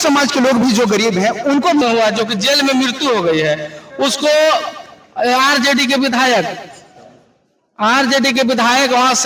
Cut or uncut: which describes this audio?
cut